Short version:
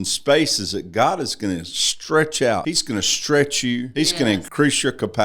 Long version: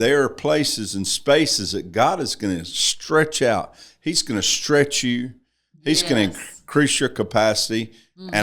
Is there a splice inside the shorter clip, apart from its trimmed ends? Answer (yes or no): yes